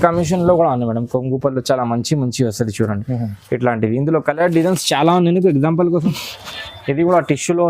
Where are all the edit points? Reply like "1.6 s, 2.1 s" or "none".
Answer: 6.0 s